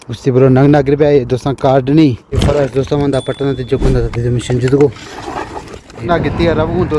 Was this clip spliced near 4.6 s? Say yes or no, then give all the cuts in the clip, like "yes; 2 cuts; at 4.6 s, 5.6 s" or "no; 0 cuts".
no; 2 cuts; at 2.3 s, 6.0 s